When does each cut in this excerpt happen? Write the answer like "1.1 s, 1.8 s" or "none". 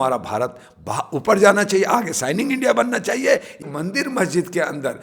3.7 s